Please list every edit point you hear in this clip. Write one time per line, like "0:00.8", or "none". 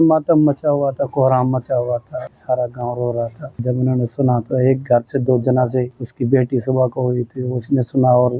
0:02.3
0:03.5
0:06.0